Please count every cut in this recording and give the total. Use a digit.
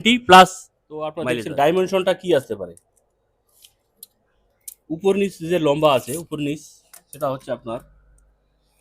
1